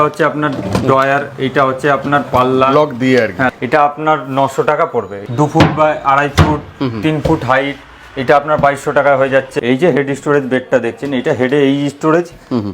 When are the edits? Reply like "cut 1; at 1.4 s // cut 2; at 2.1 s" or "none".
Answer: cut 1; at 3.5 s // cut 2; at 5.2 s // cut 3; at 9.5 s

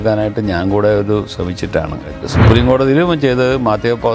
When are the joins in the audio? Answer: cut 1; at 2.2 s

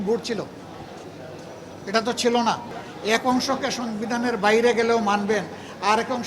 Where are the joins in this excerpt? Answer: cut 1; at 3.2 s

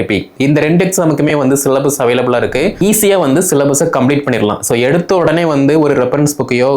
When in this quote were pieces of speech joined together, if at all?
cut 1; at 2.8 s

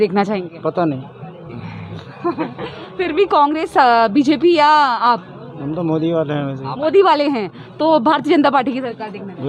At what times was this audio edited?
none

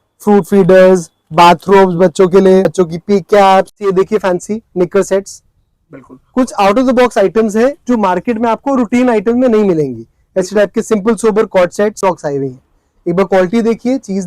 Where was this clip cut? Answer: cut 1; at 2.6 s // cut 2; at 3.8 s // cut 3; at 12.0 s

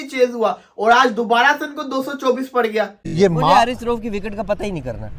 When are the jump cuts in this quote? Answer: cut 1; at 3.0 s

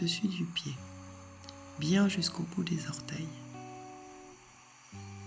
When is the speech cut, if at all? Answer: cut 1; at 3.3 s

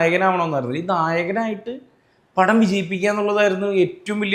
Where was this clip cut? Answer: none

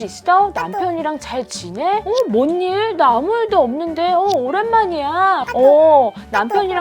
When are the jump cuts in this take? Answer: cut 1; at 5.5 s

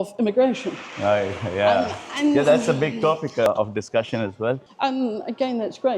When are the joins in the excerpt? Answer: cut 1; at 4.6 s

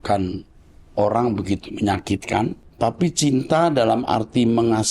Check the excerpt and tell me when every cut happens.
cut 1; at 2.6 s

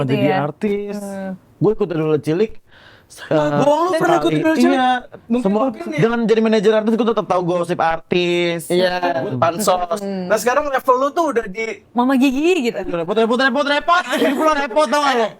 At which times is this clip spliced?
cut 1; at 5.2 s // cut 2; at 9.2 s // cut 3; at 12.8 s

